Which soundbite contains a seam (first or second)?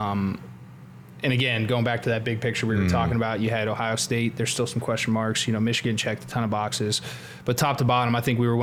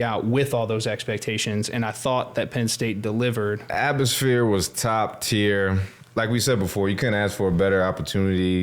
second